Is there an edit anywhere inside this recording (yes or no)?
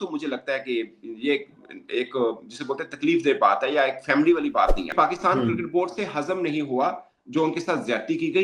yes